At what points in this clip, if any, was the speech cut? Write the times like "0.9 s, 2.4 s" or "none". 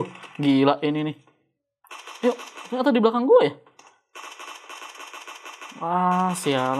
none